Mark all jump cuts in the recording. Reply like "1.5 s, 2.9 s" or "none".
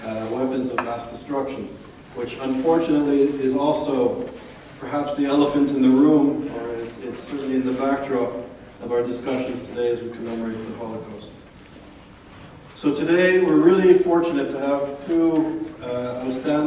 none